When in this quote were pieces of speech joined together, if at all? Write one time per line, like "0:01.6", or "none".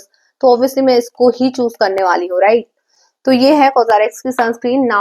none